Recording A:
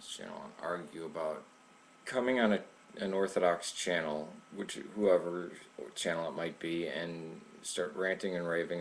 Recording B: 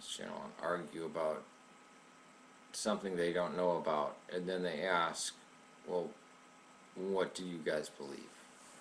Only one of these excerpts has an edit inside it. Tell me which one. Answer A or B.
B